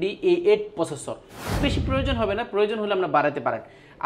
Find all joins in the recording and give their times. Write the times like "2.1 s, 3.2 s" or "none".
1.6 s